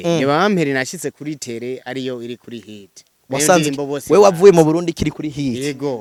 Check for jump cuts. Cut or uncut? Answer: uncut